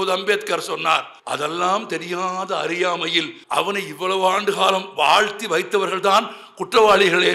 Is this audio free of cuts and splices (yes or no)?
no